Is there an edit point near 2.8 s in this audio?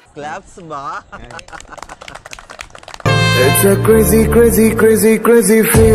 yes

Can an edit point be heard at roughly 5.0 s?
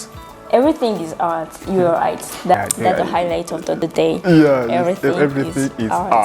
no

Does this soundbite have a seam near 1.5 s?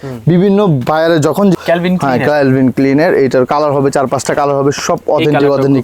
yes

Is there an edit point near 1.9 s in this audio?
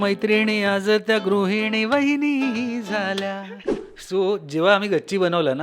no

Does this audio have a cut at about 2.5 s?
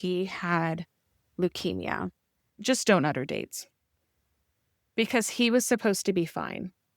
yes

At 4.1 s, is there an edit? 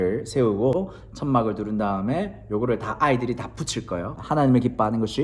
yes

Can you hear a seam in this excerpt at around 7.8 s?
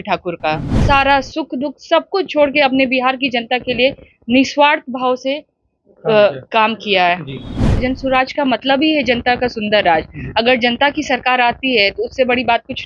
yes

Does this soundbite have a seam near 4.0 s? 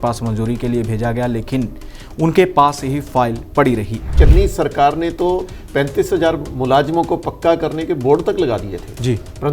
yes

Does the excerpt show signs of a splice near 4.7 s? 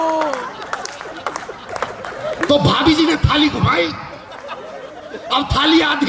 no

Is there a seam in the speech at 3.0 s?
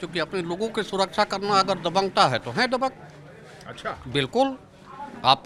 no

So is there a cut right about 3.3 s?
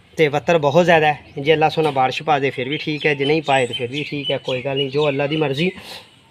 no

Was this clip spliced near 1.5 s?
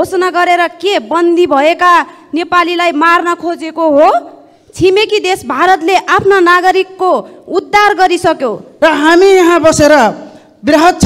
no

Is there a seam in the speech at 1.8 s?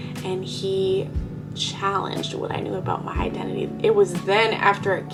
no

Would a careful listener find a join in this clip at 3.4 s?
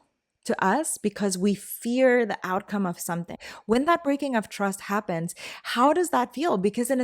yes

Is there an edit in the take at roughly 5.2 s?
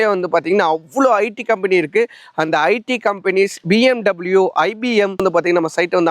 yes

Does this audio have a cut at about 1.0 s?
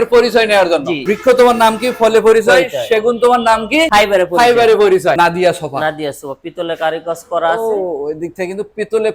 yes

